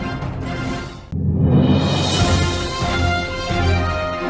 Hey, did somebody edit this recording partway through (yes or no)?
no